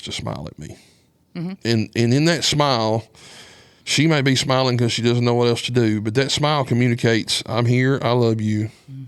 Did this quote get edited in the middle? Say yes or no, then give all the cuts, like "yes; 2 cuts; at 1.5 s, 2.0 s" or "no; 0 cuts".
yes; 1 cut; at 1.6 s